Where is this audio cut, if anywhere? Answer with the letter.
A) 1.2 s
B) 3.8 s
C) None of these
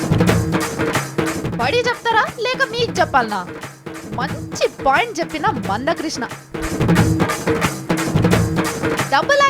A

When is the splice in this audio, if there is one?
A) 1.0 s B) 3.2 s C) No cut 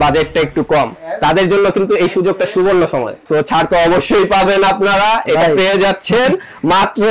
B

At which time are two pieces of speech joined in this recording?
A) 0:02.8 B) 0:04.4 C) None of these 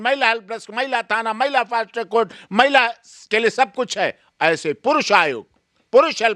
C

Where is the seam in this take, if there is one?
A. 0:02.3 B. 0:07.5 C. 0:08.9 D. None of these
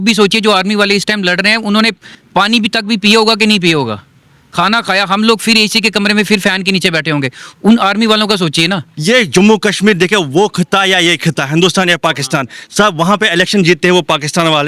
C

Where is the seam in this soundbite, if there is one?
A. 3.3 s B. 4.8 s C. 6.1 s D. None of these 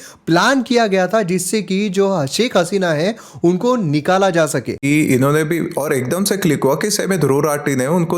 B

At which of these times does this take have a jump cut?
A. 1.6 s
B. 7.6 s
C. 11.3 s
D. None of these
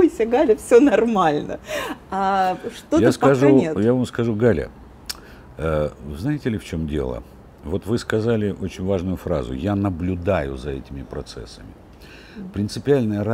D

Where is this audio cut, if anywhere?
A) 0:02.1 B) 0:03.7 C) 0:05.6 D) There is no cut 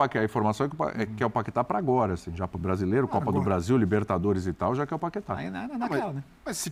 D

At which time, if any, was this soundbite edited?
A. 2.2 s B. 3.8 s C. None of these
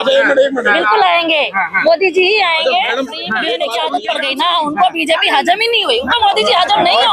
B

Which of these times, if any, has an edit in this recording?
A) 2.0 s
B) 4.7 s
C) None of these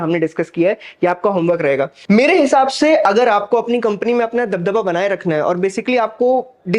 A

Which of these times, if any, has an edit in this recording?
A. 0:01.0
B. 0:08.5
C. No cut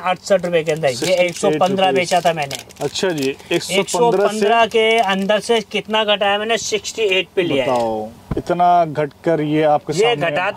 C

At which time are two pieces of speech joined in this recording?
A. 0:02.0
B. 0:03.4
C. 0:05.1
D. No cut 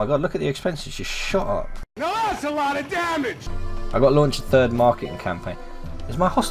B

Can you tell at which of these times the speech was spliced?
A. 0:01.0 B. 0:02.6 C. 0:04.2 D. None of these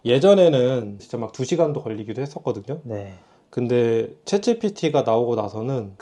A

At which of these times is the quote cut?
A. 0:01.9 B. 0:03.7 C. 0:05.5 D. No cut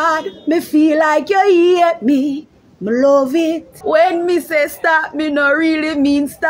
B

